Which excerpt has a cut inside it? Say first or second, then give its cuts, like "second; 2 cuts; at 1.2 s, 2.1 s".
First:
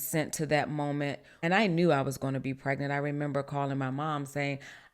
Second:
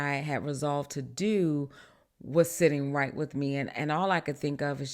first; 1 cut; at 1.3 s